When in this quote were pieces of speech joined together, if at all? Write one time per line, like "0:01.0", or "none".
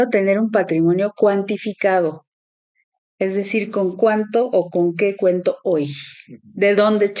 none